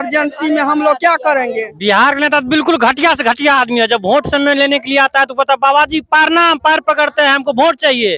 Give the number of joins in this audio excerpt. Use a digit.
1